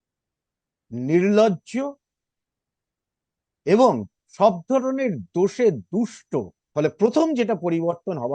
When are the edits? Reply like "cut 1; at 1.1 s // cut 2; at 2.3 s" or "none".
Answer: cut 1; at 6.6 s

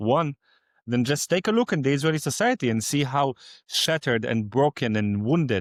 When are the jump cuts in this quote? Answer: none

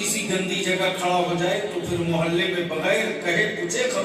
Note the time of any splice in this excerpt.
none

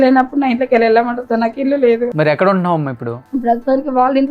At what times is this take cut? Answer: cut 1; at 2.1 s // cut 2; at 3.1 s

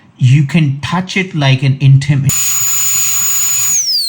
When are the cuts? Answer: cut 1; at 2.3 s

